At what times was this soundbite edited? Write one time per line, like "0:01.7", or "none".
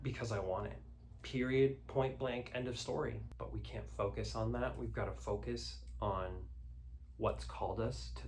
0:03.3